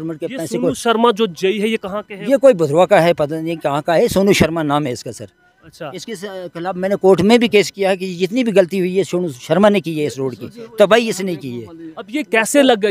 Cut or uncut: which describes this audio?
uncut